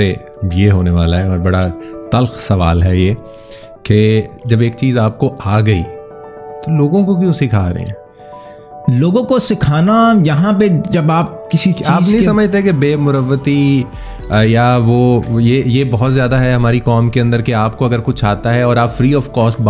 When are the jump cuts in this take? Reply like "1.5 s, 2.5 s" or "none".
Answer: none